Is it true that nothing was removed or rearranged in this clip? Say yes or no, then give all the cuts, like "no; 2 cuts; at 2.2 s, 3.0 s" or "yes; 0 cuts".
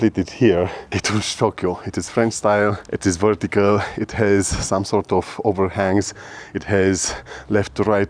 no; 1 cut; at 0.9 s